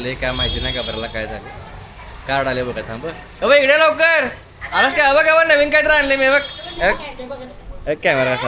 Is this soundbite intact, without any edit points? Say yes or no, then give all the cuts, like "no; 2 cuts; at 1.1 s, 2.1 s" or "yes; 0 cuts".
yes; 0 cuts